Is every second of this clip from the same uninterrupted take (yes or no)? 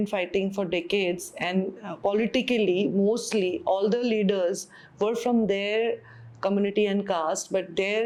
yes